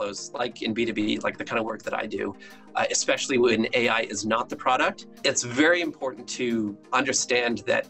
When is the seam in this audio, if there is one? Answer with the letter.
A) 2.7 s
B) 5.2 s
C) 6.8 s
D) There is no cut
C